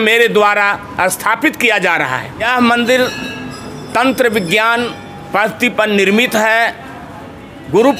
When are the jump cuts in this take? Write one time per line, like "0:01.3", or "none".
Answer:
0:02.4